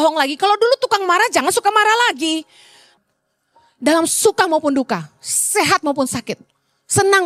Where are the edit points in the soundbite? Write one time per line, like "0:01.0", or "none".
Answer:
0:02.9